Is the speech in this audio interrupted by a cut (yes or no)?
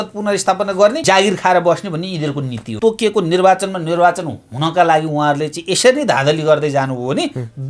yes